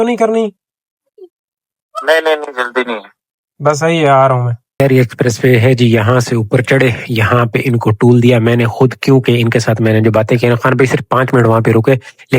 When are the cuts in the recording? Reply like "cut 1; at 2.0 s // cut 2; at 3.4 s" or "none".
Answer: cut 1; at 4.8 s